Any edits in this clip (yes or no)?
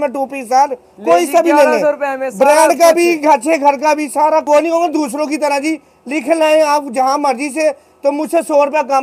yes